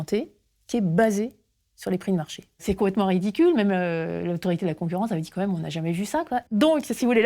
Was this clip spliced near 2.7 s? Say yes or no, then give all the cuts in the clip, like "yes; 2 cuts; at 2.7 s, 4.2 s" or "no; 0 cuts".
yes; 2 cuts; at 2.7 s, 6.4 s